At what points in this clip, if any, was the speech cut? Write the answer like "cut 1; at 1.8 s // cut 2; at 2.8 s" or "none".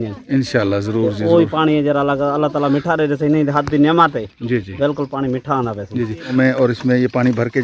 cut 1; at 6.3 s